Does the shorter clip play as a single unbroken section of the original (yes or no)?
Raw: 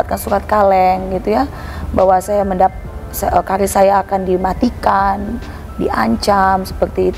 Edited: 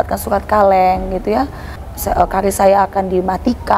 no